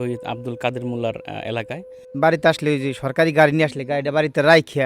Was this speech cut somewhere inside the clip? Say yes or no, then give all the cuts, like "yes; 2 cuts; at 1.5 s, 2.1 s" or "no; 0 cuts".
yes; 1 cut; at 2.1 s